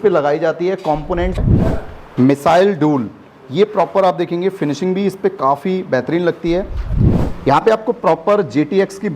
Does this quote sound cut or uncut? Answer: cut